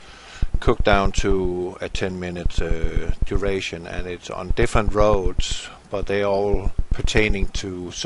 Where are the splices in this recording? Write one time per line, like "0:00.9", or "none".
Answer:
0:06.0

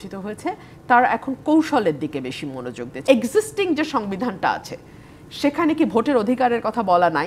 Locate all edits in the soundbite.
0:03.0

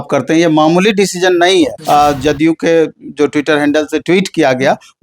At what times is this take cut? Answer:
0:01.8

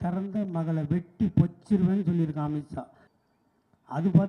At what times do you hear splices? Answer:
0:03.0

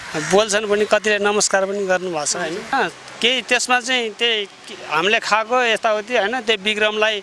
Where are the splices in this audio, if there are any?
0:02.7

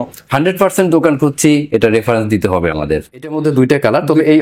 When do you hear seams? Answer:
0:03.4

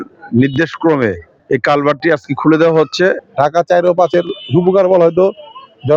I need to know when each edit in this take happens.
0:03.2

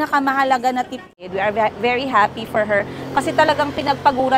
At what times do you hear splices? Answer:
0:01.0

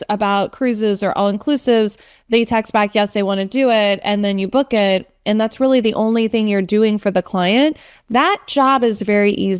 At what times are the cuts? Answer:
none

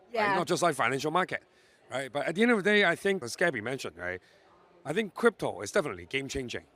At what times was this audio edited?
0:03.2

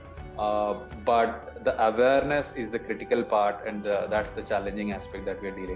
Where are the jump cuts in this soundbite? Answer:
none

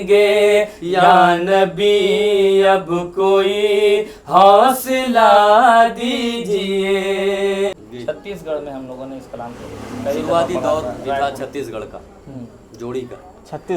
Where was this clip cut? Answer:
0:07.7

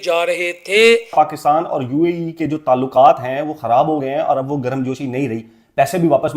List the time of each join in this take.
0:01.1

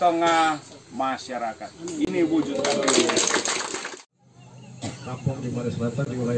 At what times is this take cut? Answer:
0:03.8

